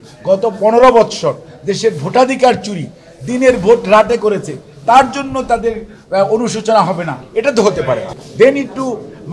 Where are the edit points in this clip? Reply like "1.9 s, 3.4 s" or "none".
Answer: 8.2 s